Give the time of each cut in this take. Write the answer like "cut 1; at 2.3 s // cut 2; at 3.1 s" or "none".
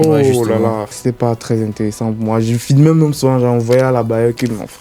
cut 1; at 0.9 s